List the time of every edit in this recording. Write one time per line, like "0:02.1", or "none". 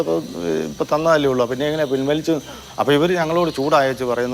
none